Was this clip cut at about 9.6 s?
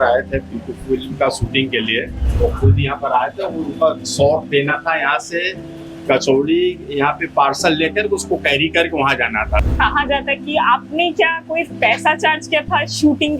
yes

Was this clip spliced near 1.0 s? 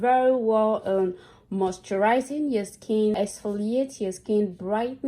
no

